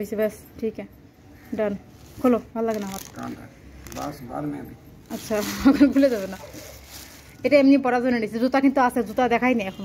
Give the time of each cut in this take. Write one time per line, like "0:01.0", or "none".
none